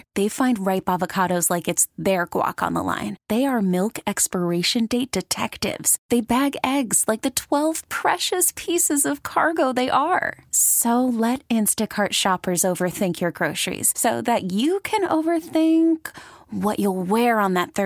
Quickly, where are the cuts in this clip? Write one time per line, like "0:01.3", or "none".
none